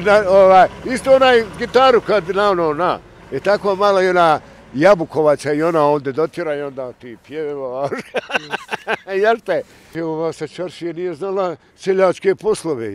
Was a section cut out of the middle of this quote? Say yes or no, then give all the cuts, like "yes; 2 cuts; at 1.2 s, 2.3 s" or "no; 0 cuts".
yes; 1 cut; at 9.8 s